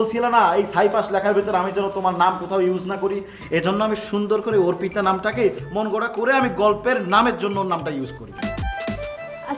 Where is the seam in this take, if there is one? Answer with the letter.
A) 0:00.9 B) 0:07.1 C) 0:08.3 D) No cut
C